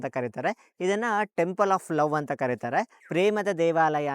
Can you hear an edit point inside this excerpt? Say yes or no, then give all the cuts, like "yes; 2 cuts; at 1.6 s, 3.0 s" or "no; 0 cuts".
yes; 1 cut; at 3.0 s